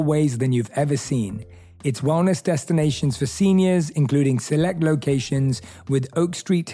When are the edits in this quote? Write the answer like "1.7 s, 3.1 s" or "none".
none